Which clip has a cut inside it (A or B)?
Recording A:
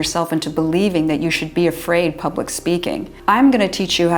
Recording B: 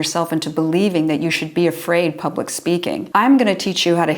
B